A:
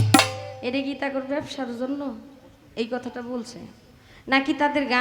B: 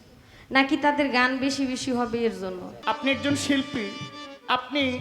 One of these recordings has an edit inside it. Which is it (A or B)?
B